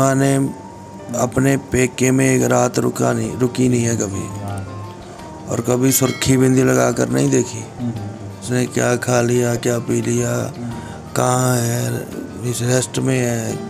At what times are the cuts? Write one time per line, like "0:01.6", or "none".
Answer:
0:08.4